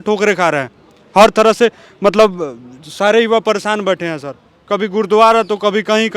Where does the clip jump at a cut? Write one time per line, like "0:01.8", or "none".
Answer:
none